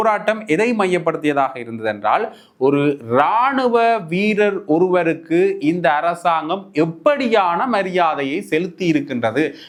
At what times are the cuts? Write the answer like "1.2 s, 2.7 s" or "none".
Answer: none